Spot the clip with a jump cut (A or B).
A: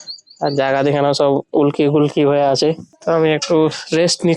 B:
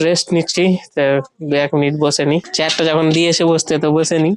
A